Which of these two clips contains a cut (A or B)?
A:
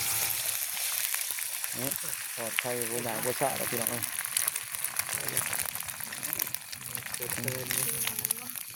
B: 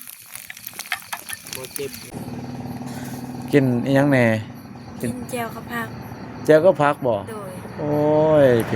B